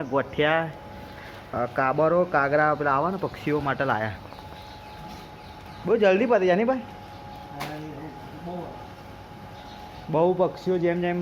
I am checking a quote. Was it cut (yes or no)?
no